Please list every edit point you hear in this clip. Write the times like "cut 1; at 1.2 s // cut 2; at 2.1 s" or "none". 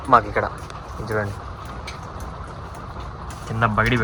none